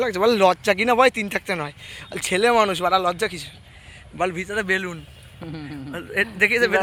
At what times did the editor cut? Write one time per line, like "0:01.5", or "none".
none